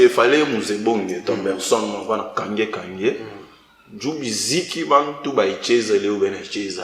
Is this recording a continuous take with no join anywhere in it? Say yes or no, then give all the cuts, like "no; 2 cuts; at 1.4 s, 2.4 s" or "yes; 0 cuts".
yes; 0 cuts